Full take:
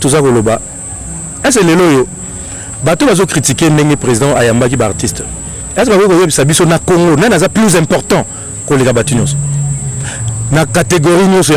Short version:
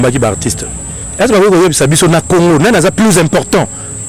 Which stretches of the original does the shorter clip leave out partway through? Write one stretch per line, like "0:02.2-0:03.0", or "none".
none